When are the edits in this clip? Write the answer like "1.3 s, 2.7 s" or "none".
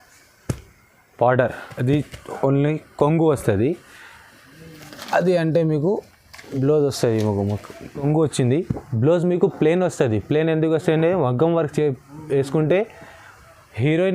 8.0 s